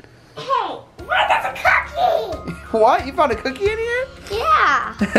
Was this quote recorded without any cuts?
yes; 0 cuts

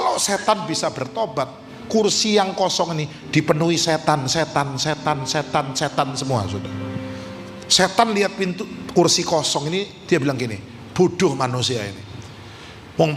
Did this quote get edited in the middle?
no; 0 cuts

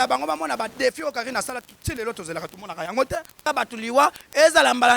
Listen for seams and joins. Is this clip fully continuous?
no; 1 cut; at 3.5 s

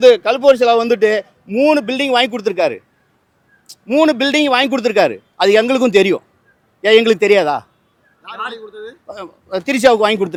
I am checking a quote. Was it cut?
no; 0 cuts

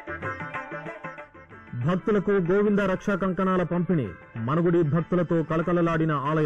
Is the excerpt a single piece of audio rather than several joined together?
no; 1 cut; at 1.1 s

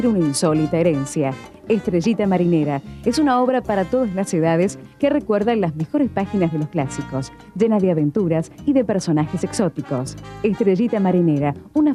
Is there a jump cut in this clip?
no; 0 cuts

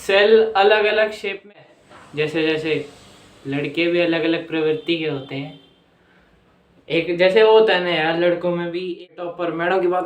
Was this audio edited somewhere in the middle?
yes; 2 cuts; at 1.5 s, 9.1 s

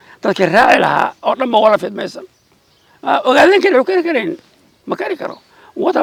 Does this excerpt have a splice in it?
no; 0 cuts

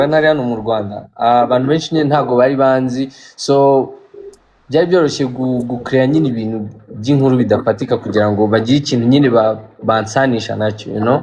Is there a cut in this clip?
no; 0 cuts

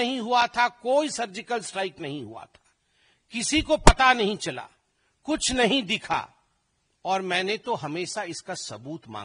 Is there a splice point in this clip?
no; 0 cuts

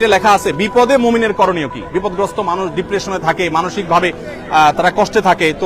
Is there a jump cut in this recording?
no; 0 cuts

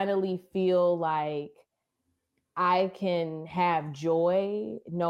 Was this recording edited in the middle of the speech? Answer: no; 0 cuts

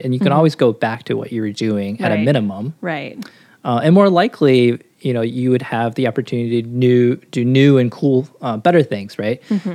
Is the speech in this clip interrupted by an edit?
no; 0 cuts

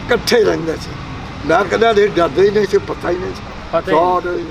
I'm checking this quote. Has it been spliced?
no; 0 cuts

